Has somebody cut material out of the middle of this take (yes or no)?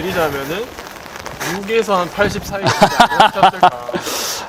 no